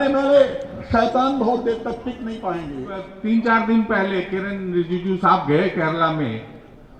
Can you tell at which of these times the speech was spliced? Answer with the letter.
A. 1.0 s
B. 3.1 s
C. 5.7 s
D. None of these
B